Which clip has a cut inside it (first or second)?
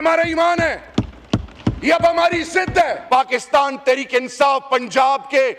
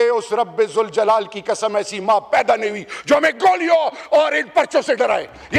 first